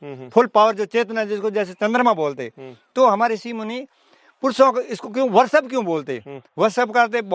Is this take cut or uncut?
uncut